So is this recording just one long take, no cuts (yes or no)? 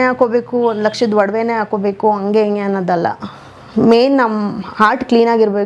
yes